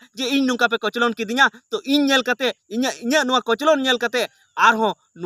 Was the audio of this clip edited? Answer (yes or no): no